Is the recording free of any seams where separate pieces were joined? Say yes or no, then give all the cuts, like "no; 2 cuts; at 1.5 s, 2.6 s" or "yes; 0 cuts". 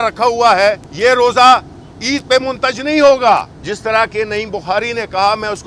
no; 2 cuts; at 0.9 s, 3.6 s